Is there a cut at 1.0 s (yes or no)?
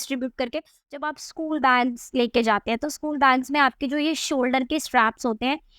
yes